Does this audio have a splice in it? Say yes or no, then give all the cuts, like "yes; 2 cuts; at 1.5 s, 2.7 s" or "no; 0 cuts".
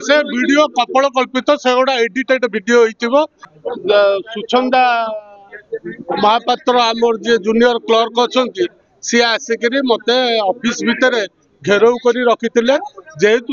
yes; 1 cut; at 3.4 s